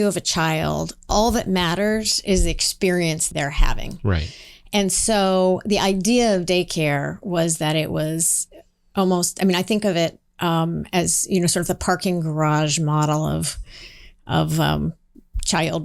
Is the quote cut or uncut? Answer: cut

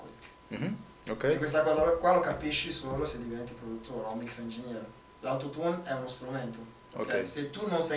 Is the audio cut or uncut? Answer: cut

